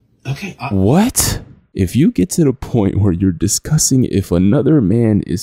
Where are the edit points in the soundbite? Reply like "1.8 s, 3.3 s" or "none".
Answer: 1.7 s